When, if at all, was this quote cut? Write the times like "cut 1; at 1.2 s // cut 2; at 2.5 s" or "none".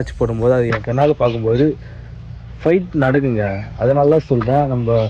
none